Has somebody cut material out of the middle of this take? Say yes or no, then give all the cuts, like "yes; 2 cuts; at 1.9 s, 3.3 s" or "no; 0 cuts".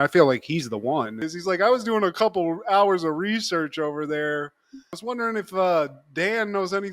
yes; 1 cut; at 1.3 s